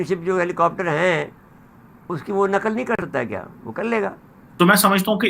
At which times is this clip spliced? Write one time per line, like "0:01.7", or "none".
0:04.4